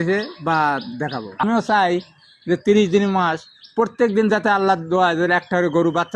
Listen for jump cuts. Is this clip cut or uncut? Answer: cut